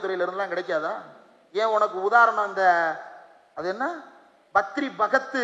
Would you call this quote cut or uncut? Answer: uncut